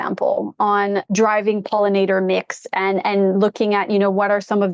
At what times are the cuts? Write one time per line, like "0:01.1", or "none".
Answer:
0:01.1